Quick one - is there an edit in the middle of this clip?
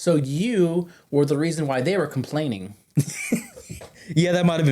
no; 0 cuts

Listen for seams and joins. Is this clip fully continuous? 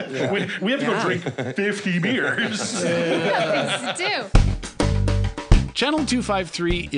no; 1 cut; at 4.3 s

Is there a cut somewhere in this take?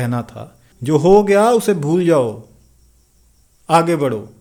no; 0 cuts

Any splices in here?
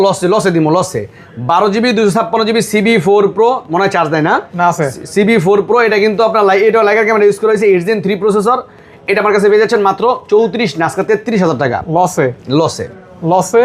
no; 0 cuts

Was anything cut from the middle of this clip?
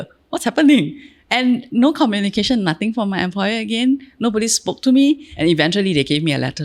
yes; 1 cut; at 5.3 s

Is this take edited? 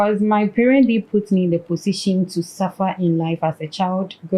no; 0 cuts

